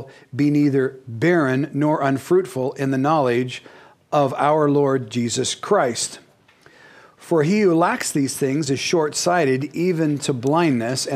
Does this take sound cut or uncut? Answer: uncut